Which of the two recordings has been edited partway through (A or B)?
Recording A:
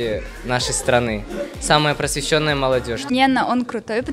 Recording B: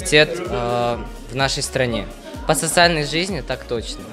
A